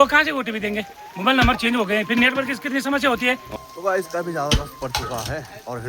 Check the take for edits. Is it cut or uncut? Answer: cut